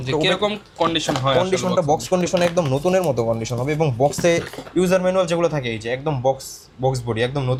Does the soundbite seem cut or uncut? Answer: uncut